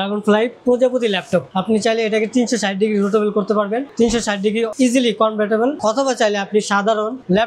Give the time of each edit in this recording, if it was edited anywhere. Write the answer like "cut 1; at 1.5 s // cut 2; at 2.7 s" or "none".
cut 1; at 1.5 s // cut 2; at 5.8 s

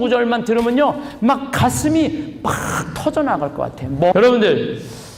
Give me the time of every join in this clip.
cut 1; at 4.1 s

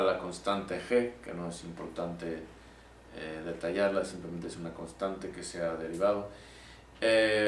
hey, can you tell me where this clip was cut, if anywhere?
cut 1; at 2.8 s

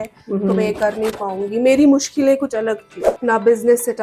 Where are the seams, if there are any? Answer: cut 1; at 2.9 s

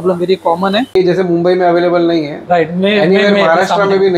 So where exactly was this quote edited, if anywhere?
cut 1; at 1.0 s

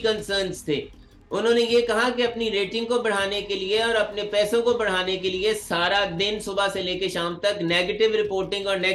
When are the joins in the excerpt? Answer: none

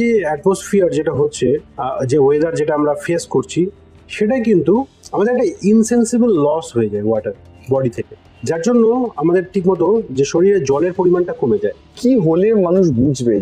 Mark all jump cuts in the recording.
cut 1; at 5.0 s // cut 2; at 11.9 s

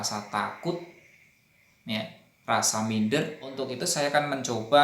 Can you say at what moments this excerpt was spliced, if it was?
cut 1; at 3.7 s

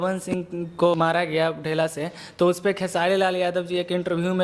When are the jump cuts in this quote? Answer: cut 1; at 0.9 s

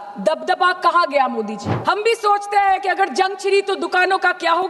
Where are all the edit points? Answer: cut 1; at 1.6 s

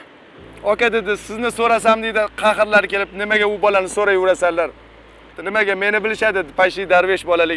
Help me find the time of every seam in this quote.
cut 1; at 5.3 s

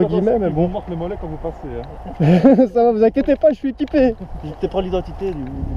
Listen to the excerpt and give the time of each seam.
none

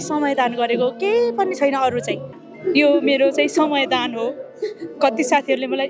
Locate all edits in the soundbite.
cut 1; at 2.4 s

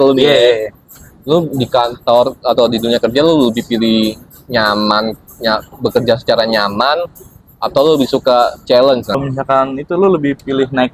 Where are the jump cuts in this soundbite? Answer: cut 1; at 9.2 s

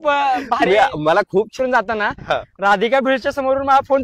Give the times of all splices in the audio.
cut 1; at 1.5 s

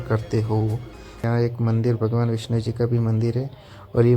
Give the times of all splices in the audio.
cut 1; at 1.2 s

